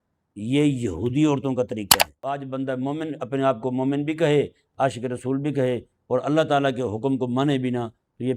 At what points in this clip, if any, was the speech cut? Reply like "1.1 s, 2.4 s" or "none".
2.0 s